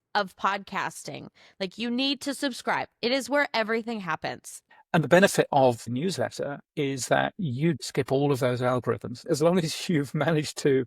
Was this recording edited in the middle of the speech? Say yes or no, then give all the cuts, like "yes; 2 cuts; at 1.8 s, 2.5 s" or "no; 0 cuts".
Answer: yes; 4 cuts; at 4.6 s, 5.9 s, 7.8 s, 9.2 s